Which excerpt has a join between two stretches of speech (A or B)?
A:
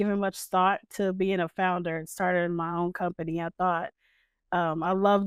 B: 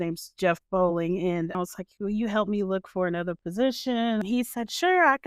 B